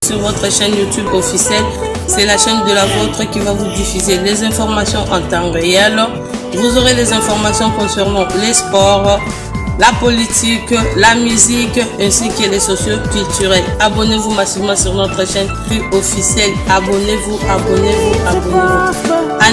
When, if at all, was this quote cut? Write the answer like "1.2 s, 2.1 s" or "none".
none